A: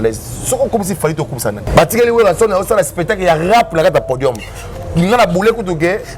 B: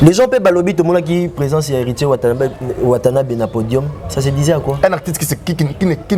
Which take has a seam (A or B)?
A